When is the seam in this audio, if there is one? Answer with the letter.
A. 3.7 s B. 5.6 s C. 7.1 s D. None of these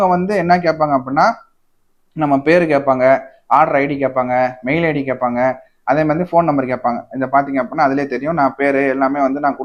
D